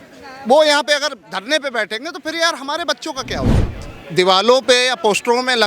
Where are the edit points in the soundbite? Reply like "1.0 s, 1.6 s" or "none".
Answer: 3.6 s